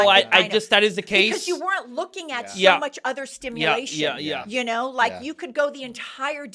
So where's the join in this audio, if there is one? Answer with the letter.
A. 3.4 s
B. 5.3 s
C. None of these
C